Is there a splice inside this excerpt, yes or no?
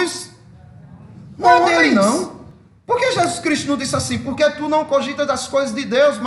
yes